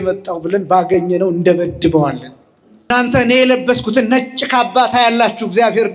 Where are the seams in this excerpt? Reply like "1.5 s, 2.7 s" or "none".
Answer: 3.2 s

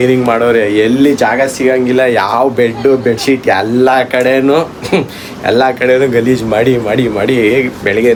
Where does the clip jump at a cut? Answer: none

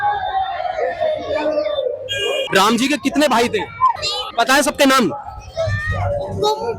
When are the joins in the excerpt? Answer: 2.4 s, 4.3 s

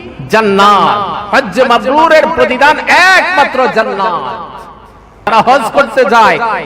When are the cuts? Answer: 4.6 s

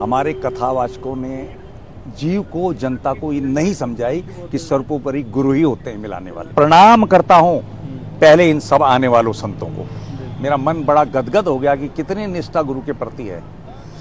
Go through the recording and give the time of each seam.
6.5 s

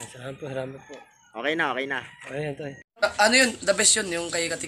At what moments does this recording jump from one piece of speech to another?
3.0 s

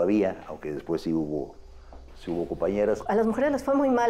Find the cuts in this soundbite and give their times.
3.0 s

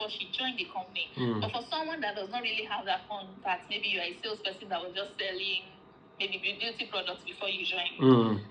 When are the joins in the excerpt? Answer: none

